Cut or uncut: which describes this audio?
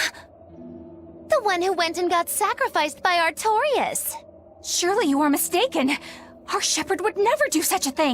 cut